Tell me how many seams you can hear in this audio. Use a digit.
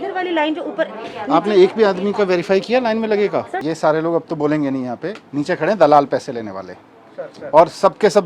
1